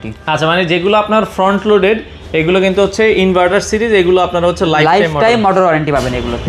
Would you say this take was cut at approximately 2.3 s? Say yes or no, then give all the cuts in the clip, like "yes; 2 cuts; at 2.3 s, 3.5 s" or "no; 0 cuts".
no; 0 cuts